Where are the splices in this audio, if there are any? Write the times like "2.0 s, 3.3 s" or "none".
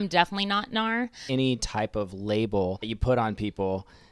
1.2 s, 2.9 s